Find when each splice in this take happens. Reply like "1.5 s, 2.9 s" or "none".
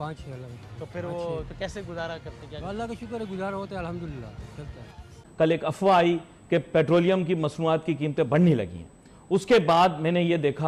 5.2 s